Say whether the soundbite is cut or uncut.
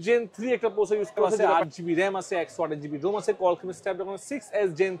cut